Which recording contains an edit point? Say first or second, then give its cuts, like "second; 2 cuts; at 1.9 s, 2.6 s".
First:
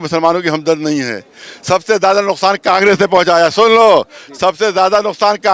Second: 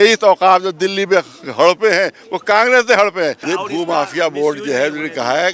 second; 1 cut; at 3.4 s